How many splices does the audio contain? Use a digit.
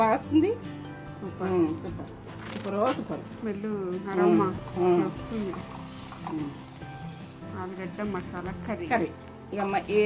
0